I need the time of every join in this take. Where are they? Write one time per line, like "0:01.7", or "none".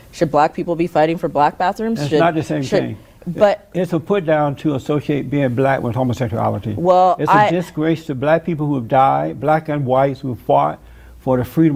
none